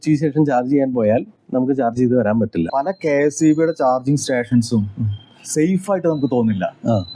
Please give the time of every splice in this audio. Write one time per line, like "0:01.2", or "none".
0:01.4
0:02.7